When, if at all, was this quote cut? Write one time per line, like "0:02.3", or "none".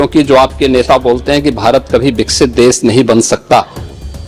none